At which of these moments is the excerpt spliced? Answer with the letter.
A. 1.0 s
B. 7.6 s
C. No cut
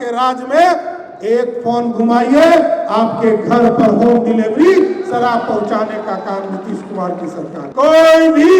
B